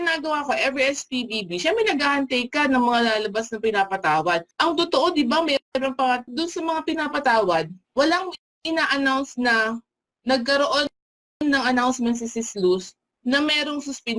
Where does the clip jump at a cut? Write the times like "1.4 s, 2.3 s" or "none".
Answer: 4.5 s, 6.3 s, 7.8 s